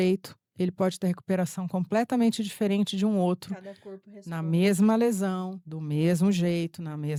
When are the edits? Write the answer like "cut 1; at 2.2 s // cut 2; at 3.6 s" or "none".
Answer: none